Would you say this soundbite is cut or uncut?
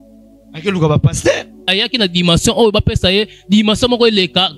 cut